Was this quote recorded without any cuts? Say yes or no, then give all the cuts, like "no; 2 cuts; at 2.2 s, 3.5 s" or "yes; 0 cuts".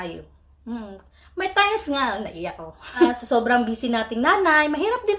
no; 1 cut; at 3.2 s